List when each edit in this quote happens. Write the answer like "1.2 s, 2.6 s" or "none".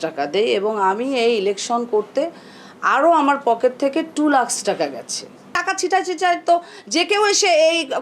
5.5 s